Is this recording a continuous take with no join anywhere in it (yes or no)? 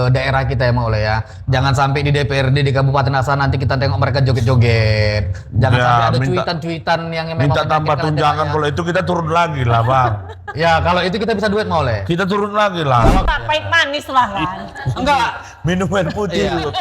no